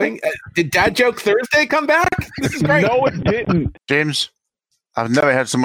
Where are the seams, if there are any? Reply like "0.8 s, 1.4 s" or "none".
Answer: 3.8 s